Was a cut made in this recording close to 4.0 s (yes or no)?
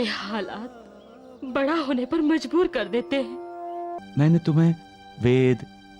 yes